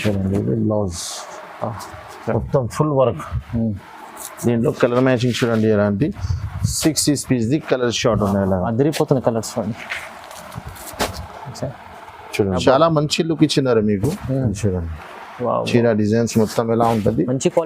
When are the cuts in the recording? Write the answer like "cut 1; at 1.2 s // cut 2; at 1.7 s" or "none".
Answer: cut 1; at 12.6 s